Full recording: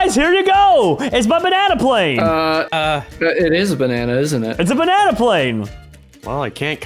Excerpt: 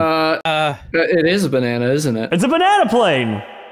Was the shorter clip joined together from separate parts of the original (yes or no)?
no